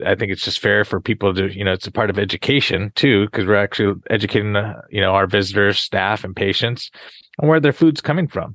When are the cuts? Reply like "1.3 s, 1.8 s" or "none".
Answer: none